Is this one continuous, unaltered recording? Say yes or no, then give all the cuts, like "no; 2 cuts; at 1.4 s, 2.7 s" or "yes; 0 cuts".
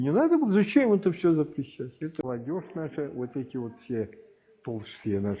no; 1 cut; at 2.2 s